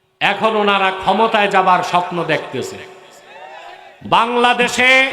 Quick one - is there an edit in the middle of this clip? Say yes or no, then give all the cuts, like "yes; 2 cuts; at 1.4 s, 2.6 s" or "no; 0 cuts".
yes; 1 cut; at 3.8 s